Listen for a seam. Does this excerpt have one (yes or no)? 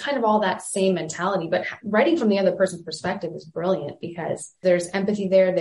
yes